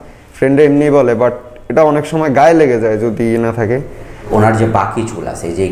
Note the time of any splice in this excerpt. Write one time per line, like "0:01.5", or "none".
0:04.3

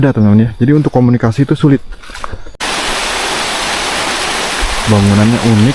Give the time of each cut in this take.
0:02.6

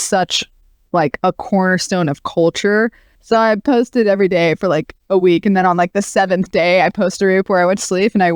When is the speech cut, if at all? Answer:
0:03.1

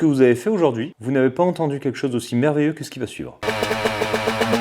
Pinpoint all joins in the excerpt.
0:00.9
0:03.4

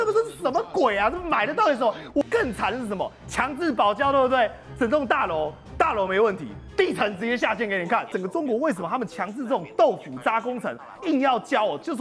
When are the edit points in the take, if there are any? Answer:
0:02.2
0:08.1

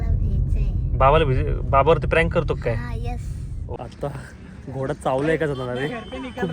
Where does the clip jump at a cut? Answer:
0:03.8

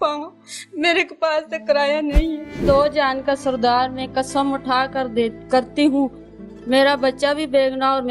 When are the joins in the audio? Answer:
0:02.6

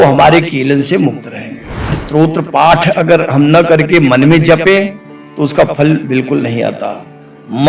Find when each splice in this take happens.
0:02.0

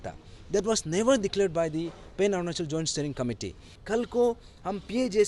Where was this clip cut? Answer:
0:03.7

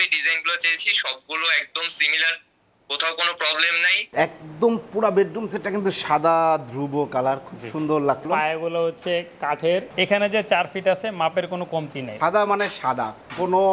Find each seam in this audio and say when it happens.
0:03.9
0:08.2
0:09.9
0:12.0

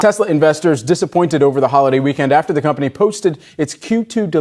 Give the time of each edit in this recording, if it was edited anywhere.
none

